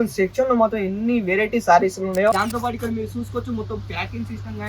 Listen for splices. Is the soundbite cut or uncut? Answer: cut